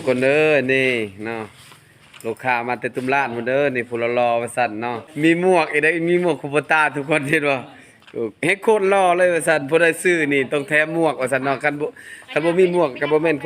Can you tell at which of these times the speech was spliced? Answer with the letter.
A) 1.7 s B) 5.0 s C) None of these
B